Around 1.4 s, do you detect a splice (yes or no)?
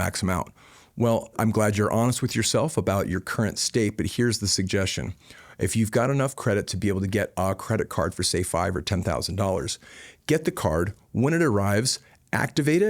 yes